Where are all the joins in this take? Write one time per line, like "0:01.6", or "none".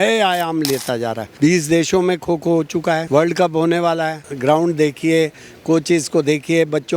0:01.2
0:03.0
0:04.2